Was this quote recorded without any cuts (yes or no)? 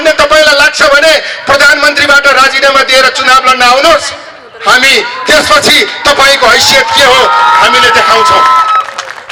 yes